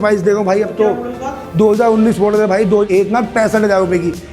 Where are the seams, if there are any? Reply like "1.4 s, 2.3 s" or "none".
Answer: 2.9 s